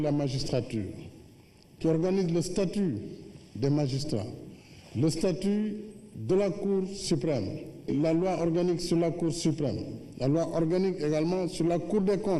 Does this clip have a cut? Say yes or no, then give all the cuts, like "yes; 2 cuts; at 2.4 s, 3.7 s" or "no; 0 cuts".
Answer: yes; 1 cut; at 4.3 s